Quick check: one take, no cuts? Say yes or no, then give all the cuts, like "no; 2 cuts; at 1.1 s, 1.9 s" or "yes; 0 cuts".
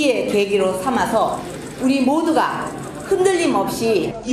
no; 1 cut; at 1.5 s